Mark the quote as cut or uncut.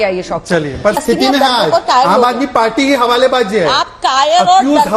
cut